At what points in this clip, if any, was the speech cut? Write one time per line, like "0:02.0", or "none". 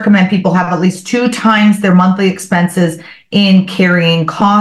none